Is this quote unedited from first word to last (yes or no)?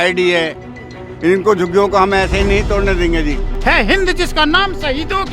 no